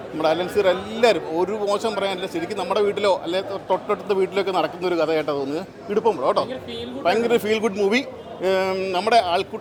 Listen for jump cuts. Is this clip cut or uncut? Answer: uncut